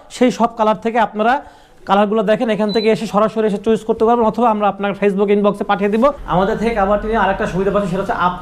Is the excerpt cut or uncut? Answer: cut